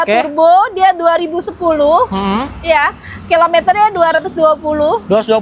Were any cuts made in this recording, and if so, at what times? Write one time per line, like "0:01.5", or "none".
none